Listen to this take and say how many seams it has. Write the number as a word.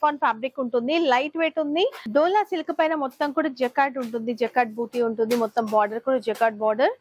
one